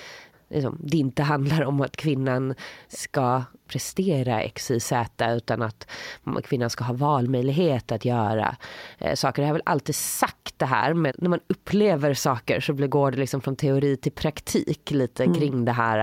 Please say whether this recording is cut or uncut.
cut